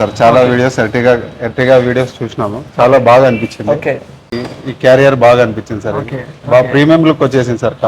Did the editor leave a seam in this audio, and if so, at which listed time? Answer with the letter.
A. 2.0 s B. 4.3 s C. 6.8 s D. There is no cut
B